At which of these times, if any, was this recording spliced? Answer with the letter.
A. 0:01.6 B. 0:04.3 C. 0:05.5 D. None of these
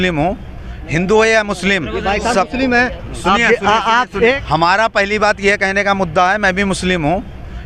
D